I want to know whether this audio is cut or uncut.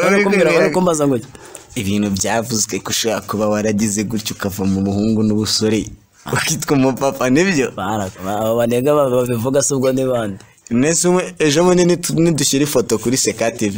uncut